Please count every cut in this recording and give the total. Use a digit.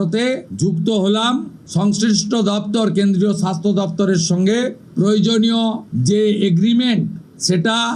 1